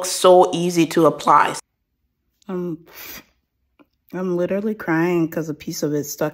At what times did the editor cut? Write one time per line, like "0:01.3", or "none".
0:01.5